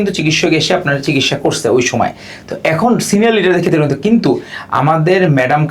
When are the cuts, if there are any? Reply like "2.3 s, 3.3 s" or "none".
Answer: none